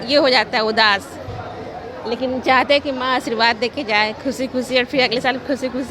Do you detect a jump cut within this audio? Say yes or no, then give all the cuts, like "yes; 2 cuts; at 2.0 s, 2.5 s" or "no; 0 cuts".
no; 0 cuts